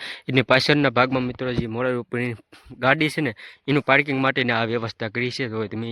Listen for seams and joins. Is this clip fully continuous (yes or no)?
yes